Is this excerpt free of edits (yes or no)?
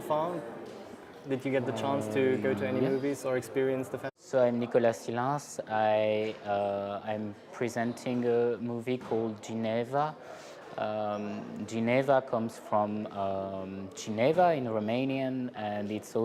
yes